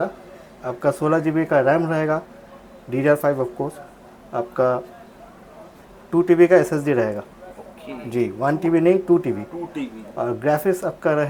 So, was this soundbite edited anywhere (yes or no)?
no